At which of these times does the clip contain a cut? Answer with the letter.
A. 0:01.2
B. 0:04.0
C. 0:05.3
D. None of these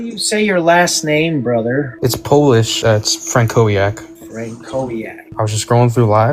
C